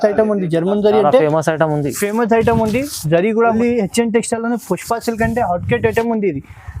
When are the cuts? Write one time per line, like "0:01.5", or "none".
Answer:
0:03.5